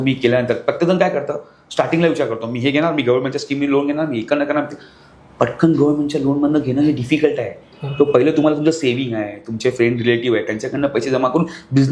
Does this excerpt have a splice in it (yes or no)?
no